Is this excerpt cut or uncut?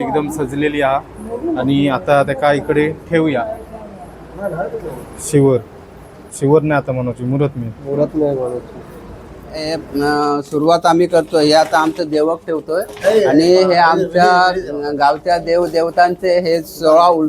cut